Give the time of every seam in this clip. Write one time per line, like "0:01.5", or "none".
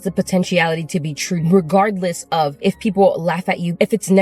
0:02.5

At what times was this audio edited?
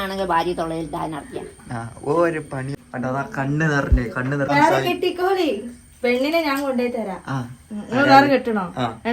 0:02.7
0:04.5

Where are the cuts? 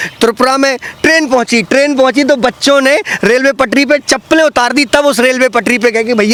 none

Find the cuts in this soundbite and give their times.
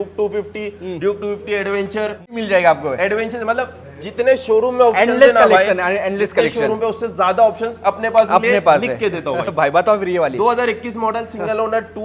none

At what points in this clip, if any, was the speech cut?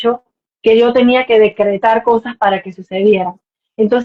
none

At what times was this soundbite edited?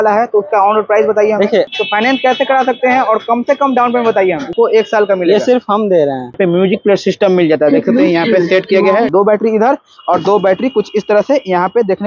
0:01.7
0:04.5
0:06.4
0:09.1

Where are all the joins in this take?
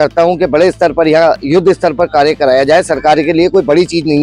none

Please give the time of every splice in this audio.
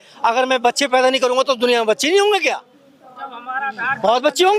none

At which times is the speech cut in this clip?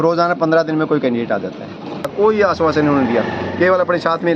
0:02.1

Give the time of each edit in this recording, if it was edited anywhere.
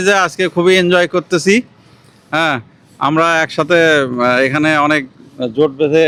none

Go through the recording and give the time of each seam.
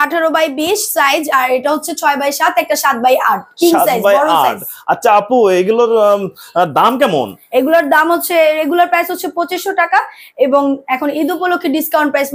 none

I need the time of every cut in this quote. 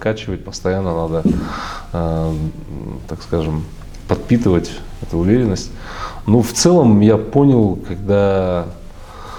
none

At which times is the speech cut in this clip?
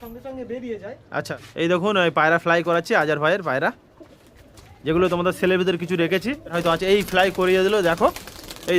0:01.3
0:06.6

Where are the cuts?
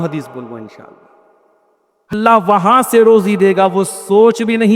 0:02.1

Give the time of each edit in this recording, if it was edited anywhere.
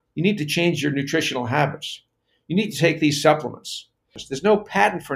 0:04.2

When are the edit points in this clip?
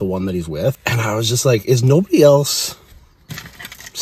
0:00.8
0:02.9

